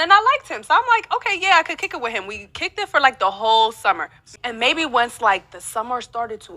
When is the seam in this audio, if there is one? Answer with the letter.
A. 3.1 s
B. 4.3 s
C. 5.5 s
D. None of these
B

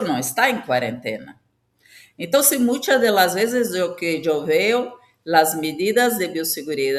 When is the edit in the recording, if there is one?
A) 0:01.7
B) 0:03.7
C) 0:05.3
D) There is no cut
D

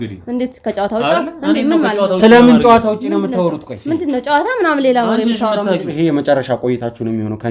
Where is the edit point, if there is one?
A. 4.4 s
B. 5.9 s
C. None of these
B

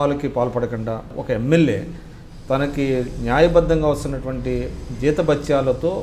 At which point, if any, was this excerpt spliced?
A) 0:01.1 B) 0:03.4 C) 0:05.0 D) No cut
A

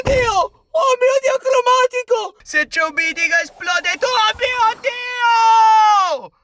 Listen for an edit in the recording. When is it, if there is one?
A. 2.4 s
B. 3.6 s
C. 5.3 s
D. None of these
A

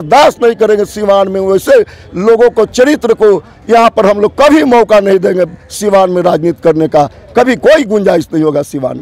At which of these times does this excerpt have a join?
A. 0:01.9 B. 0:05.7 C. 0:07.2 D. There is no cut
D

